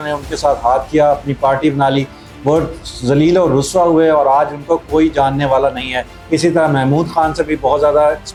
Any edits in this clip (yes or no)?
no